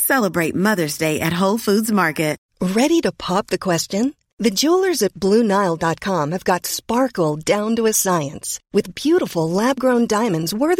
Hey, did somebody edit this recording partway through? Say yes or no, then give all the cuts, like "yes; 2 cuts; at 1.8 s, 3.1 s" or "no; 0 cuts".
yes; 1 cut; at 2.5 s